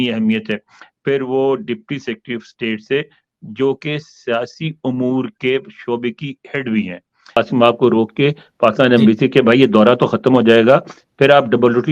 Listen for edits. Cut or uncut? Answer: cut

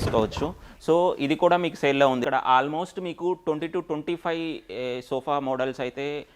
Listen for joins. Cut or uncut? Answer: cut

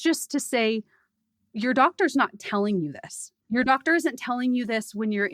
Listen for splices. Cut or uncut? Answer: cut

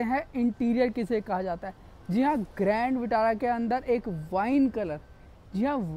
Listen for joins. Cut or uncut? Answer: uncut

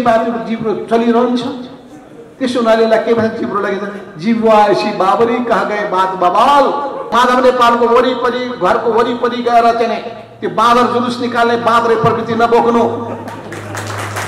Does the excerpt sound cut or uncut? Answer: cut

